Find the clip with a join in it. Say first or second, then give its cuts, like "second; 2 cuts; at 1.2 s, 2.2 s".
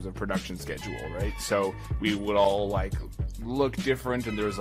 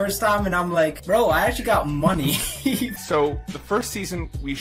second; 2 cuts; at 1.0 s, 2.9 s